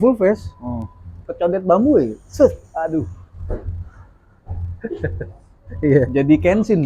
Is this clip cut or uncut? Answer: uncut